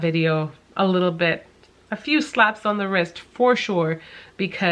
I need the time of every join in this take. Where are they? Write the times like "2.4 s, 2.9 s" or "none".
none